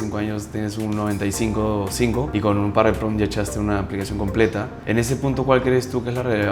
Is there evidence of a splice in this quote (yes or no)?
yes